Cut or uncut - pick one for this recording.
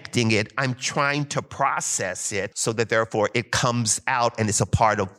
cut